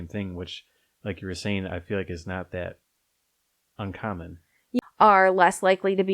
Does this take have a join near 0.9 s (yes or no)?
no